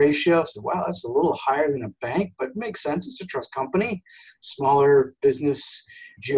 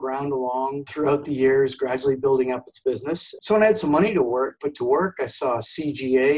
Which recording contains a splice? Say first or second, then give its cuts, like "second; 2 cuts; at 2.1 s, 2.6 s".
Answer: second; 1 cut; at 3.3 s